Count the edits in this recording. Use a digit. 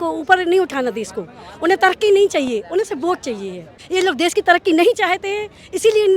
1